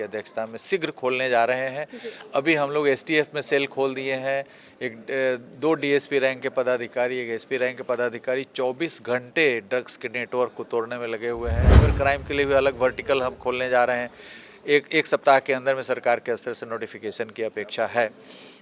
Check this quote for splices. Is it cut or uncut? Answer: cut